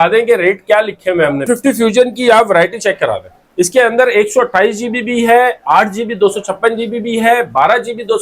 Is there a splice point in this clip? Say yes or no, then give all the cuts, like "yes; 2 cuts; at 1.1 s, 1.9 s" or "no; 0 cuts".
yes; 1 cut; at 1.4 s